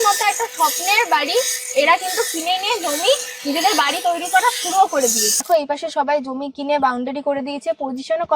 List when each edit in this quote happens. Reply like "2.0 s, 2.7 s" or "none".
5.5 s

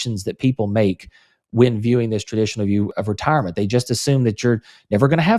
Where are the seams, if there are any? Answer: 2.9 s

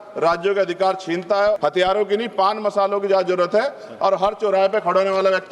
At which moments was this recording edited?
1.6 s

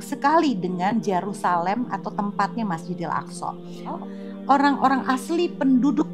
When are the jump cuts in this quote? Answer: 4.0 s

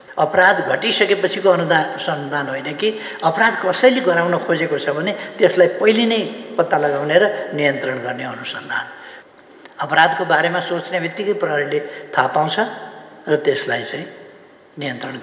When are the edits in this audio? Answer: 9.1 s

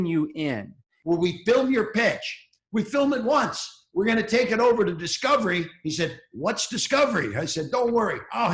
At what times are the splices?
0.9 s

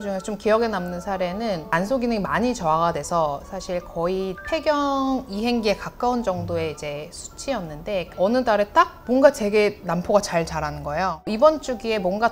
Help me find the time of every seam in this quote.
1.7 s, 8.1 s, 11.2 s

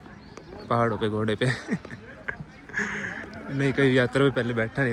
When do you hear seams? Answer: none

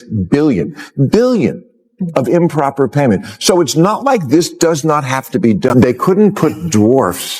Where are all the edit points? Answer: 5.7 s

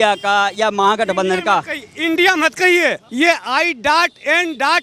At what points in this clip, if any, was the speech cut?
3.0 s

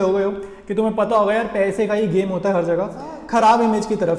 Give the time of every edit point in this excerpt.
3.1 s

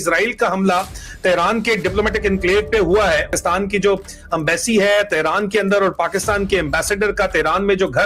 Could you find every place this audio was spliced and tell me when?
3.3 s

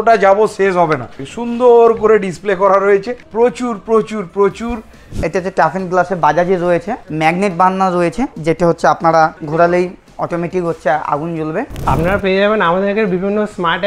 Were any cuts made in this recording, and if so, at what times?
1.3 s, 3.2 s, 5.0 s, 7.0 s, 8.3 s, 9.4 s, 10.1 s, 11.7 s

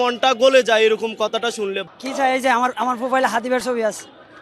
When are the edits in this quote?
1.8 s

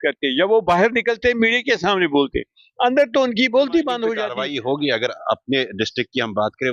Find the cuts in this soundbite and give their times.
4.2 s

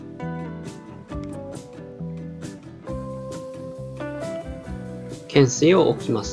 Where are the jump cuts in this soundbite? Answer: 5.3 s

